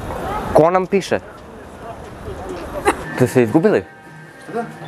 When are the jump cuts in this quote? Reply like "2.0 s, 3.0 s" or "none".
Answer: 3.0 s